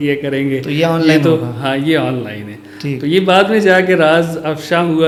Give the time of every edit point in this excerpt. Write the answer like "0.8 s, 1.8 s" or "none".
none